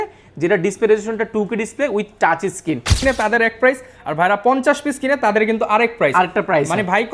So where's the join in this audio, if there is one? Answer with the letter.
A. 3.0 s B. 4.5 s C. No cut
A